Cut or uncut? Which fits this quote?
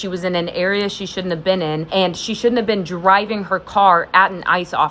cut